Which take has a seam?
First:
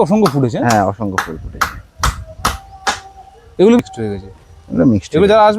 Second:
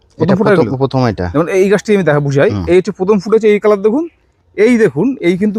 first; 1 cut; at 3.8 s

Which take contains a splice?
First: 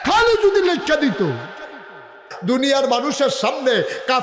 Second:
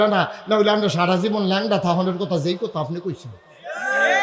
first; 1 cut; at 2.3 s

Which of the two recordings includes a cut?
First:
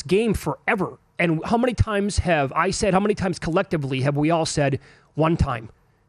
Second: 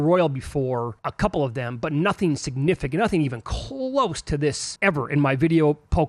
second; 2 cuts; at 1.0 s, 4.7 s

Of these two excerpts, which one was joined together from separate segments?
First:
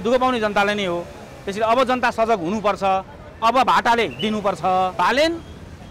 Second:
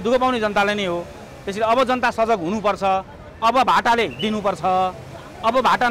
first; 1 cut; at 4.9 s

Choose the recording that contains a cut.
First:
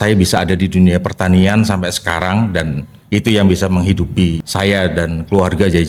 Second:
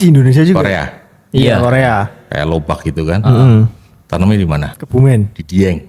second; 1 cut; at 4.7 s

